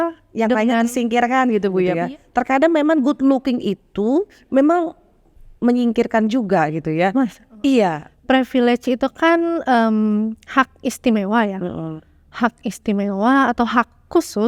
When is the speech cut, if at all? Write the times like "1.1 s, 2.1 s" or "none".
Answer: 2.0 s, 8.1 s